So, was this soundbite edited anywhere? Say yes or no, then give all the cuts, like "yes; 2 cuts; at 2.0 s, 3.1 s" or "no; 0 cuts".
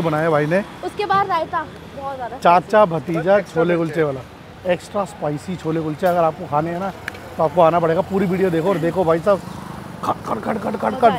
no; 0 cuts